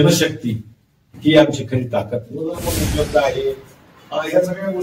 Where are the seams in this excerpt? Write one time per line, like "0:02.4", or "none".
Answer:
0:02.6